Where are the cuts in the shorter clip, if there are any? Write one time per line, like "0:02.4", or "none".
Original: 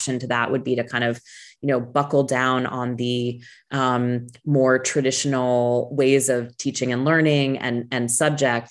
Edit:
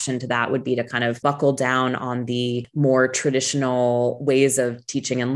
0:01.2
0:02.7